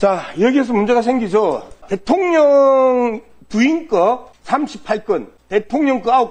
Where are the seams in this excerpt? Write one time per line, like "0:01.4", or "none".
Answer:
0:01.9
0:04.3
0:05.4